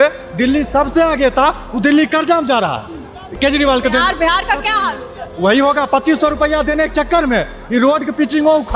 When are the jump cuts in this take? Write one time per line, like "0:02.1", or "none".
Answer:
none